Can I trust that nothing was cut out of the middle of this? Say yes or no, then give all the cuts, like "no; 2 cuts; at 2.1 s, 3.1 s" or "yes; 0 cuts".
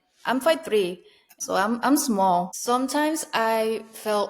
no; 1 cut; at 1.4 s